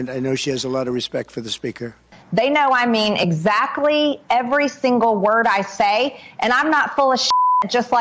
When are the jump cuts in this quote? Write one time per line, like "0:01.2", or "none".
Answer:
0:02.1